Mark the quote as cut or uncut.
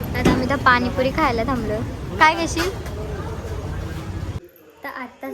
cut